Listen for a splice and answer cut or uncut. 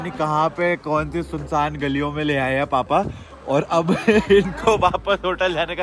uncut